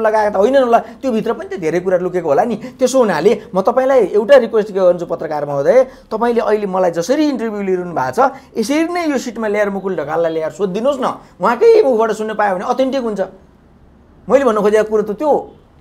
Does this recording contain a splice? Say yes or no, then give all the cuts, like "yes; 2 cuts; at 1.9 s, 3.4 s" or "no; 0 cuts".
no; 0 cuts